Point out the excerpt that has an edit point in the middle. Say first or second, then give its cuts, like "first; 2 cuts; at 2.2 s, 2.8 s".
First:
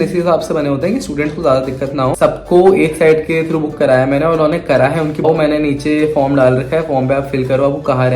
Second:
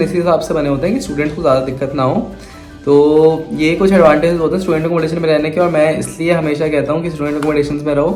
first; 2 cuts; at 2.2 s, 5.2 s